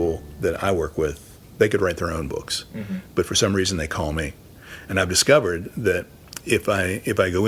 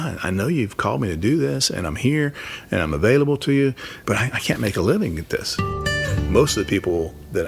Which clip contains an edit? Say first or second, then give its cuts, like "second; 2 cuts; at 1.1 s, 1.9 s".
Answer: second; 2 cuts; at 3.9 s, 5.6 s